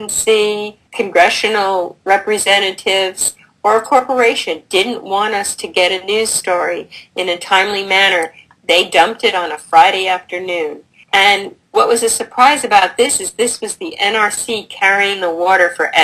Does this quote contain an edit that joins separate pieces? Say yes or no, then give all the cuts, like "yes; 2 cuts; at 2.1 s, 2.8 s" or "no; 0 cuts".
yes; 1 cut; at 7.3 s